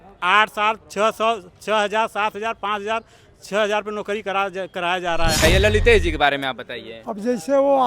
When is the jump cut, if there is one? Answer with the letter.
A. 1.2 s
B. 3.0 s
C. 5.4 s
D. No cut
C